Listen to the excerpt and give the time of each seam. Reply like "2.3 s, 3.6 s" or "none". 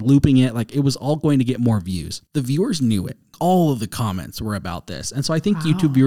2.1 s, 3.3 s